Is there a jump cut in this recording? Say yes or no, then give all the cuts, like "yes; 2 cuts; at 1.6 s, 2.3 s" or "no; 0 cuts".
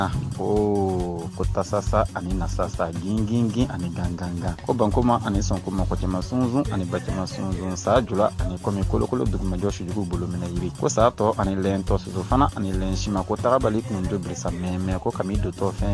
no; 0 cuts